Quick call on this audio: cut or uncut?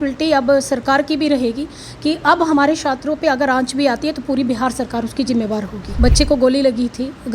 cut